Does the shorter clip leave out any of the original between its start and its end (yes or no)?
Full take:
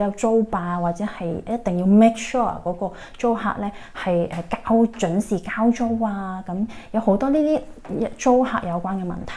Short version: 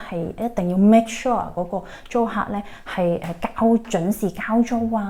no